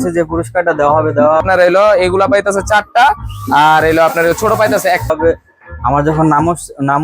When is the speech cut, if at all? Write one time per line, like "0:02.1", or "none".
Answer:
0:01.4
0:05.1